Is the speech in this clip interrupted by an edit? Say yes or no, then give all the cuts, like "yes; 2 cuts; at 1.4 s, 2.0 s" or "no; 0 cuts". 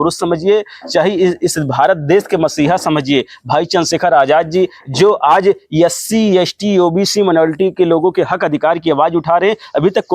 no; 0 cuts